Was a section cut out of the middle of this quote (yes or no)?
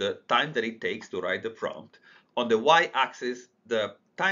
no